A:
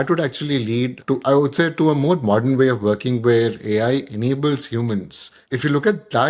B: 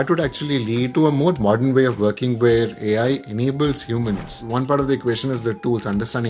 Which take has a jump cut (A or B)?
B